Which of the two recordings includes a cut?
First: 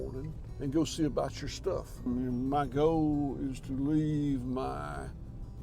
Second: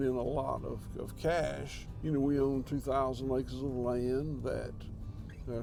first; 1 cut; at 1.9 s

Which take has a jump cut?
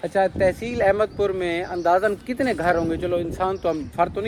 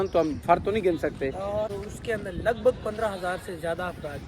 second; 1 cut; at 1.7 s

